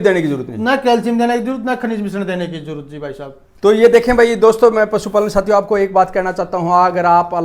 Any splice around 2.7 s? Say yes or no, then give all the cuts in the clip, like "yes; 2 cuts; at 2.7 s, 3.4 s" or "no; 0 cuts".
no; 0 cuts